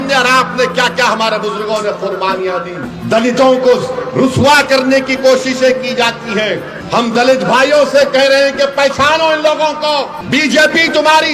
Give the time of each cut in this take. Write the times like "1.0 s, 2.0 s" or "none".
2.9 s, 6.7 s, 10.2 s